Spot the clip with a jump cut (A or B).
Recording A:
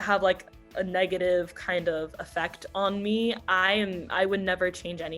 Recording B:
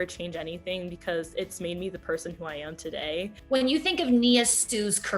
B